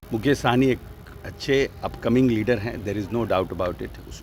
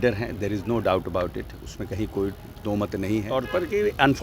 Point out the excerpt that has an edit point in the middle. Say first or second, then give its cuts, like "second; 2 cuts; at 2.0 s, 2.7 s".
second; 1 cut; at 3.3 s